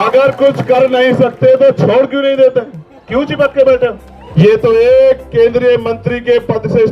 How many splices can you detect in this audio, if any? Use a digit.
1